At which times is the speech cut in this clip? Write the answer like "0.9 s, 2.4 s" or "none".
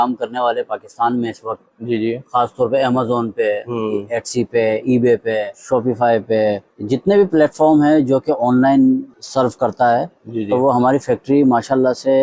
5.6 s, 6.7 s, 9.2 s

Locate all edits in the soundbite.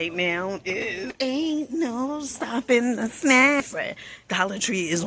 1.1 s, 3.6 s

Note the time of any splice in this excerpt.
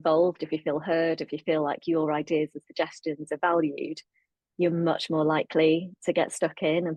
none

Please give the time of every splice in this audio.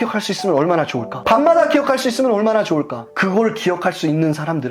none

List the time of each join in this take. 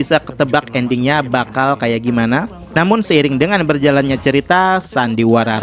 2.6 s

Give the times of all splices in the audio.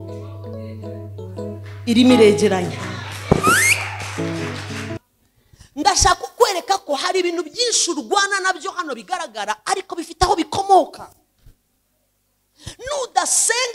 5.0 s

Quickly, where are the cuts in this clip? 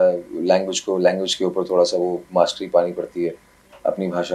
none

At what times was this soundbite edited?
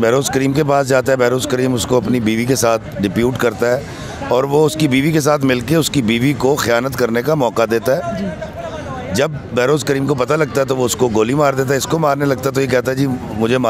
none

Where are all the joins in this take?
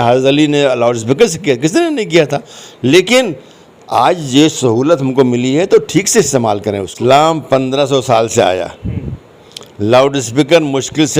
6.8 s

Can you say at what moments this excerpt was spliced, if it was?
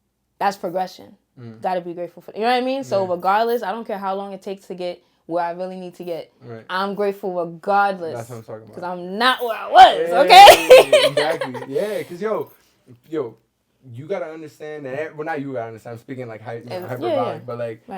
none

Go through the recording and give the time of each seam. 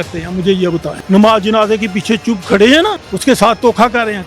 0.9 s, 3.1 s

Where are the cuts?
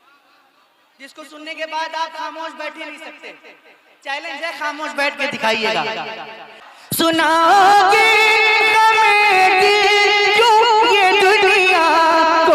7.0 s

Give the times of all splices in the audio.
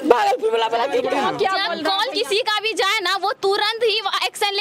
1.1 s

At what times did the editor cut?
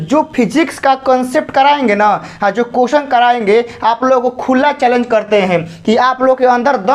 none

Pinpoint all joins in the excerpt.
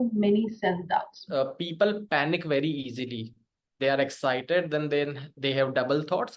1.2 s

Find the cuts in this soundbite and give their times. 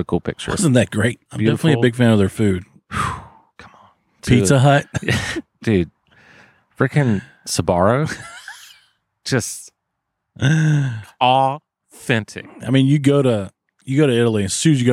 1.3 s, 4.2 s

